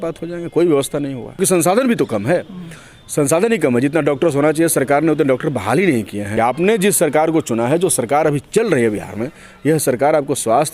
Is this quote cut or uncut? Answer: cut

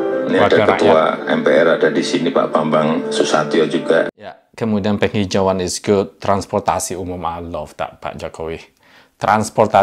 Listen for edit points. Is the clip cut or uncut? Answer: cut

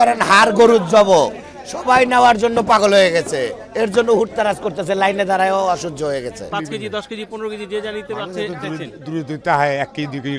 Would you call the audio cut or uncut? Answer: cut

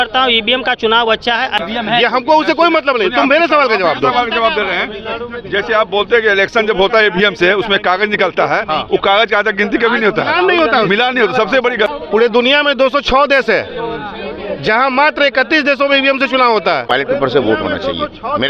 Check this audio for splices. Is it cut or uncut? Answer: cut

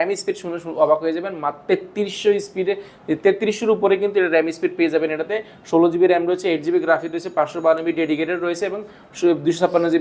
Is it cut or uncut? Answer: uncut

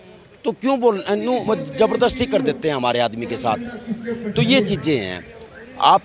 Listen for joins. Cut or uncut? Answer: uncut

